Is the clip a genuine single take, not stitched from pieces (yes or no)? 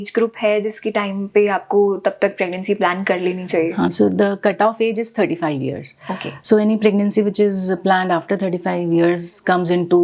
yes